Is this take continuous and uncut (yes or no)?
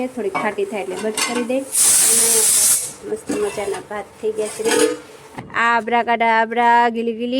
no